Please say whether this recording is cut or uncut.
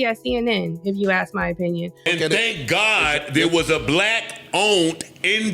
cut